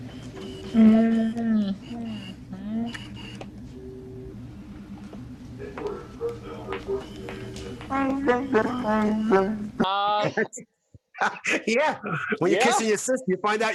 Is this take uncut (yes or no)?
yes